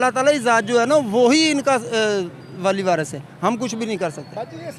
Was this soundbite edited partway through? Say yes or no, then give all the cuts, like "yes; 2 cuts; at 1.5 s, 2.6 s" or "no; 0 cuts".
no; 0 cuts